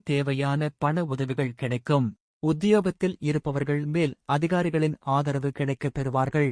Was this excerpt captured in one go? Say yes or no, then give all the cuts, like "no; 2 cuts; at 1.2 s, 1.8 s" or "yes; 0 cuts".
no; 1 cut; at 2.2 s